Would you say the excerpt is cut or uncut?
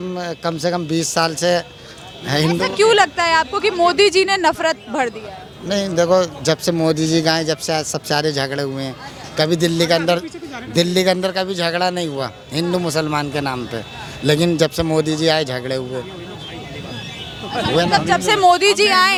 uncut